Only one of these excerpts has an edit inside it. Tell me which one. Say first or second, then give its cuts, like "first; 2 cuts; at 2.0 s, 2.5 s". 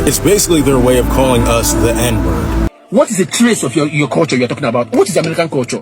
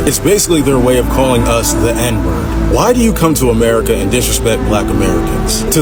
first; 1 cut; at 2.6 s